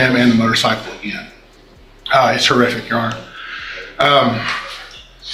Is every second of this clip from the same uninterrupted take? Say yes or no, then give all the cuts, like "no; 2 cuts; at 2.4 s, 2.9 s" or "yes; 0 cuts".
yes; 0 cuts